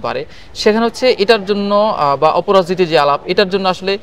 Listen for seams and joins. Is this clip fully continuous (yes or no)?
yes